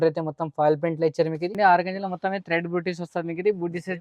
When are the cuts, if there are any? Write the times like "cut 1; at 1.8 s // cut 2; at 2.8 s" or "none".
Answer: cut 1; at 1.5 s